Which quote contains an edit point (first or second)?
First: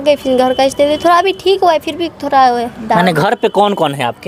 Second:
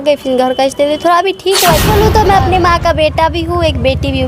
second